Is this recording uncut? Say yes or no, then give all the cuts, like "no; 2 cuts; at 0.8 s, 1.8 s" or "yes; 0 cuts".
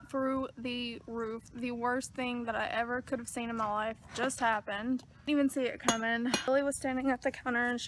yes; 0 cuts